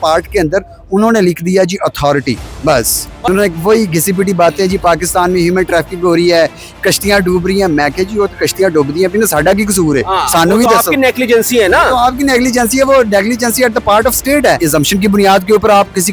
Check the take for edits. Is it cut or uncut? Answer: cut